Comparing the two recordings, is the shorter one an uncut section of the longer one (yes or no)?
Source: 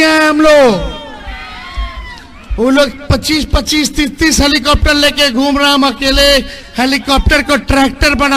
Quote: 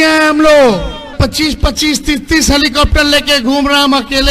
no